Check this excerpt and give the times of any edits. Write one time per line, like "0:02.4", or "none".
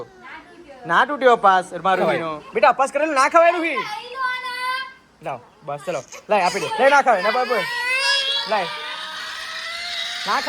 0:02.0
0:06.7